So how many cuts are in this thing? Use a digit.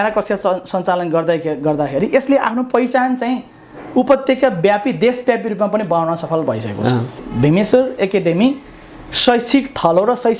1